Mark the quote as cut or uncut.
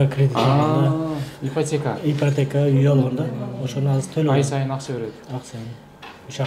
uncut